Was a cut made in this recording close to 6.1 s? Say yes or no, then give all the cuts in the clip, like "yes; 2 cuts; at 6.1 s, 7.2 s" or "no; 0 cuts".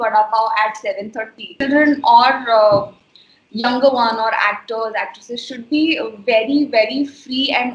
no; 1 cut; at 1.5 s